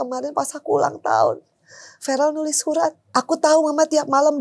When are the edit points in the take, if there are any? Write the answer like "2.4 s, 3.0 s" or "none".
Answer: 3.0 s